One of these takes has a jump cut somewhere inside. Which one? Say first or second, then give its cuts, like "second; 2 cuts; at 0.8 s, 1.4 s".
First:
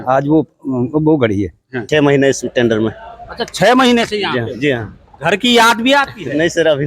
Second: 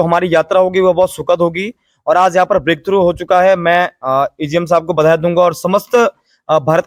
first; 1 cut; at 1.8 s